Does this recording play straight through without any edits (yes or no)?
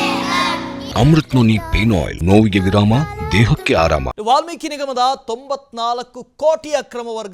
no